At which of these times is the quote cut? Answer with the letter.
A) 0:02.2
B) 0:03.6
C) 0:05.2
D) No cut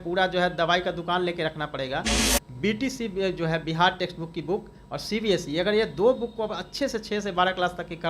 A